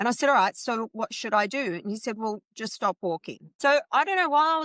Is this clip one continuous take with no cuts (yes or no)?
no